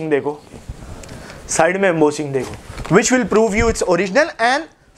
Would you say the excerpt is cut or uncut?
uncut